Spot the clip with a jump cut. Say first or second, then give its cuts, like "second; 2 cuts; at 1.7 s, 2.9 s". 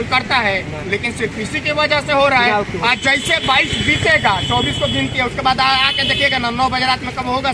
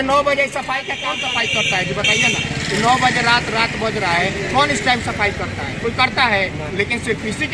second; 1 cut; at 1.0 s